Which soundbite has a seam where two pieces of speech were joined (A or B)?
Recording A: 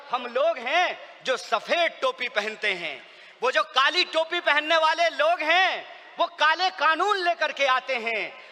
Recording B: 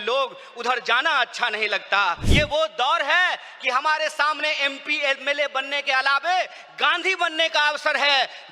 B